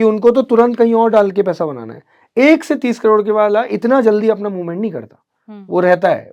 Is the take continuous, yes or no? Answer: yes